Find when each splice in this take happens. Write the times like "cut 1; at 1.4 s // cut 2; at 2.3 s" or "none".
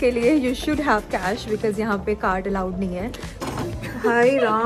cut 1; at 3.3 s